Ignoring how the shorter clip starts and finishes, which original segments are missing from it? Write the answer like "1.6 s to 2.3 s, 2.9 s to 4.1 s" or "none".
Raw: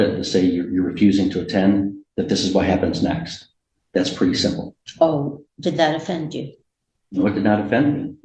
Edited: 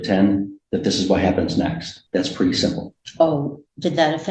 3.4 s to 3.7 s